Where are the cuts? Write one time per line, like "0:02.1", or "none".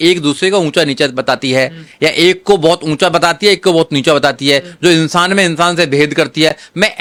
none